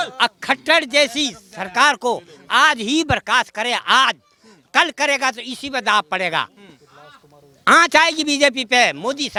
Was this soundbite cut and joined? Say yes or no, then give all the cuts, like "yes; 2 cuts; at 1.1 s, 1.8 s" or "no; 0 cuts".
no; 0 cuts